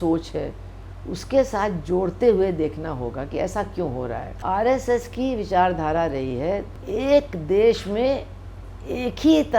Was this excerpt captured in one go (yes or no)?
no